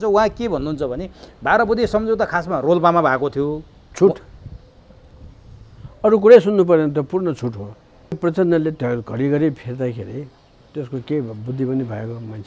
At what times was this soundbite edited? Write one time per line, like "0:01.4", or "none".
0:08.2